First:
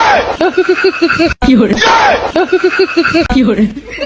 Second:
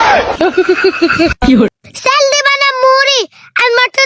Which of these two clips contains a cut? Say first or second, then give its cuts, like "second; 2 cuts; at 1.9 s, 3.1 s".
second; 1 cut; at 1.7 s